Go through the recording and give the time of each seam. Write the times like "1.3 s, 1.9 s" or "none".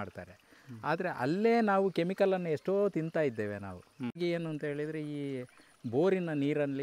4.2 s

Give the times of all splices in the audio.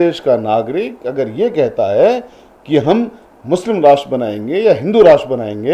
none

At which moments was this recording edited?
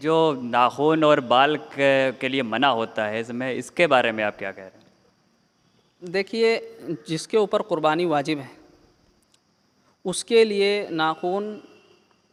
none

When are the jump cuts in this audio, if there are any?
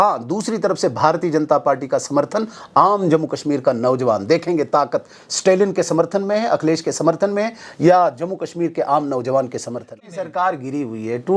9.9 s

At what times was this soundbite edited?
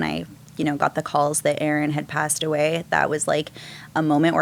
none

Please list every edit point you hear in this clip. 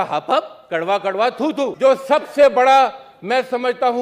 1.7 s

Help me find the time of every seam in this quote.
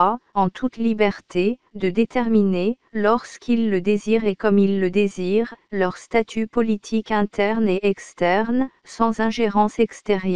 none

